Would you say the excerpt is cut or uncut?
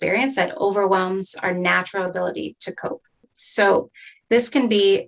cut